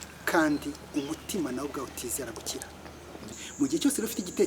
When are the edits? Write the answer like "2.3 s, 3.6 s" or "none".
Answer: 3.3 s